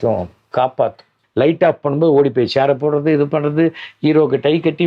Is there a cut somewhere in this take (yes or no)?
yes